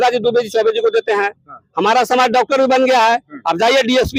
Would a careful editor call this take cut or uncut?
uncut